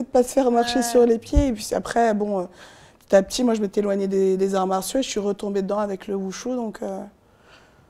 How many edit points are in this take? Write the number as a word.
zero